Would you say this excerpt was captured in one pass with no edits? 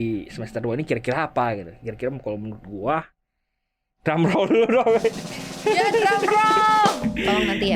yes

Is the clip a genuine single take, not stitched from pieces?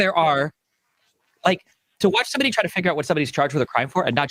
yes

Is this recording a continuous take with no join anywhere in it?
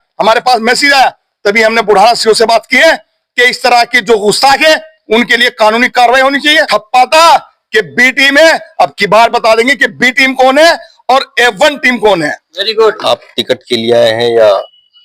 no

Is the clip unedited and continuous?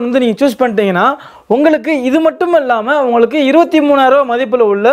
yes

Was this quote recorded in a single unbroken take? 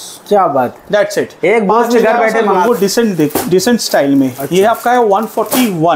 no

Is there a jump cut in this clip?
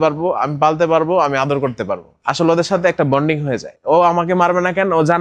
yes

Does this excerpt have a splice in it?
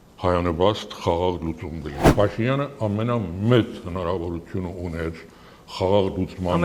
yes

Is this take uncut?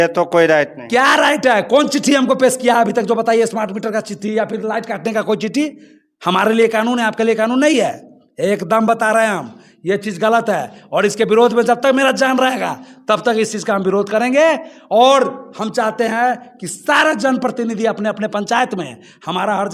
yes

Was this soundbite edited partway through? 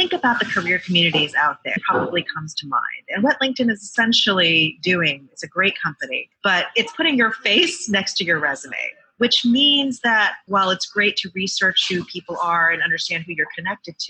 yes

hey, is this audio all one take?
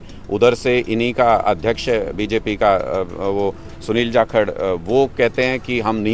yes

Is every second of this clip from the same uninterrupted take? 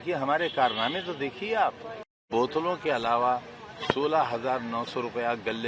no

